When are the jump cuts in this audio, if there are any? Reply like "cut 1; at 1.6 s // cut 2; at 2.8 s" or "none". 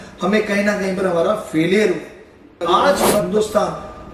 cut 1; at 3.2 s